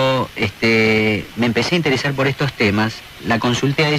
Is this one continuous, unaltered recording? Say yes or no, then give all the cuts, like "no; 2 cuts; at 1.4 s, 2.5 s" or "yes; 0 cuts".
yes; 0 cuts